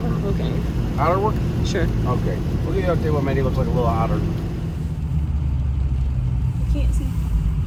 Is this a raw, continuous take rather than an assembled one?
yes; 0 cuts

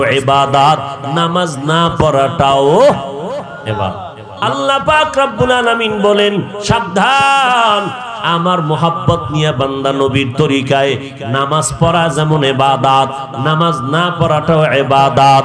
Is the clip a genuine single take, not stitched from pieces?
no; 1 cut; at 4.3 s

